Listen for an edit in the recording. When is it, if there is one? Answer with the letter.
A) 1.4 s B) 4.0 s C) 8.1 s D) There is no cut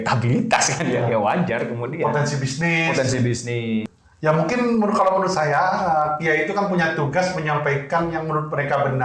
B